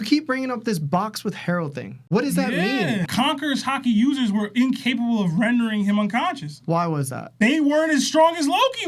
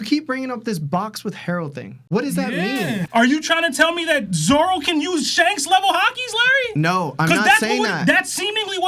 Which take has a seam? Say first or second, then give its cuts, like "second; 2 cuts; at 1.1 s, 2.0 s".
second; 1 cut; at 3.0 s